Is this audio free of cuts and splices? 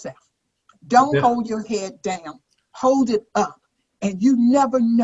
yes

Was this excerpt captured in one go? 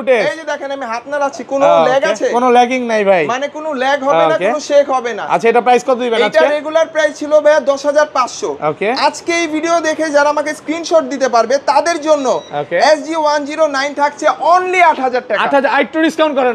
yes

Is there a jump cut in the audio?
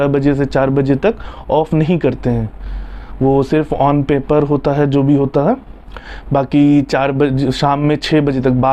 no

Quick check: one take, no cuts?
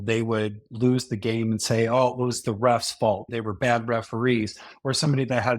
no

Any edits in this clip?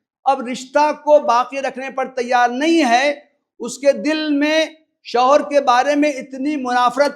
no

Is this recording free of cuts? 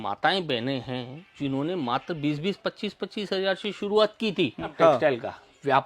no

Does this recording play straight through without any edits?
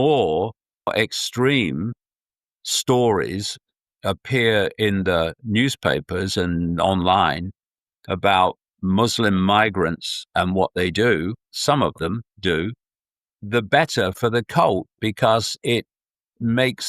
no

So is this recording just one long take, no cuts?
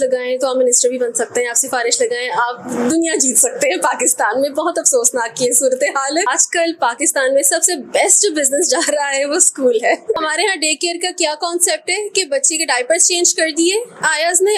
no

